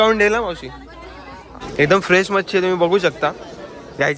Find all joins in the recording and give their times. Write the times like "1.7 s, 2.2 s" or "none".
1.6 s